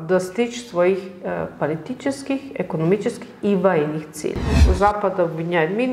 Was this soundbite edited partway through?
yes; 1 cut; at 4.6 s

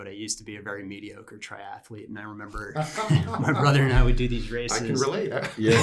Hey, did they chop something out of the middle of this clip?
no; 0 cuts

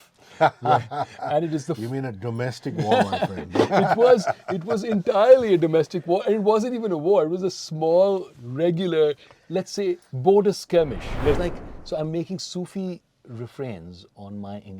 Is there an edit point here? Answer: yes; 1 cut; at 11.4 s

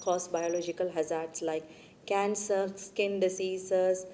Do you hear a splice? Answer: no; 0 cuts

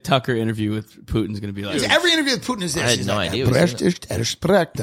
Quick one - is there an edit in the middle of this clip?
yes; 1 cut; at 1.8 s

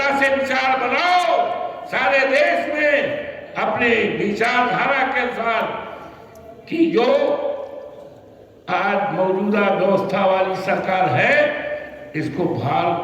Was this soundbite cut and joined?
no; 0 cuts

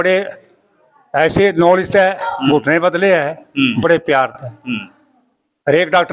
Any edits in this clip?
no; 0 cuts

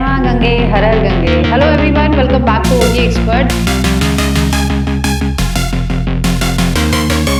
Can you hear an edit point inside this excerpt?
no; 0 cuts

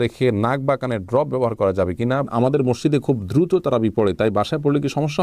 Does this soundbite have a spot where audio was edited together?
yes; 1 cut; at 2.3 s

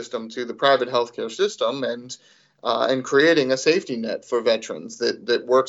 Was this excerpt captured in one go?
yes; 0 cuts

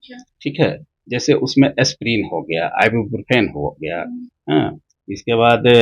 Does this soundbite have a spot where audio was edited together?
no; 0 cuts

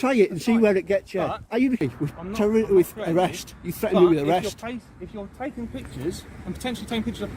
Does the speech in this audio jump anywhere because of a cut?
yes; 1 cut; at 1.8 s

